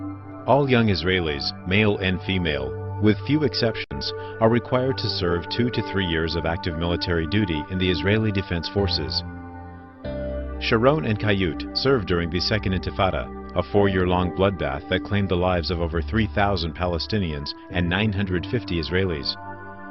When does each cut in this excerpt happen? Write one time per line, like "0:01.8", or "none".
0:06.0